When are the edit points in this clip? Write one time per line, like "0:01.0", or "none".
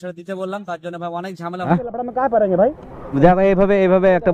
0:01.7
0:03.2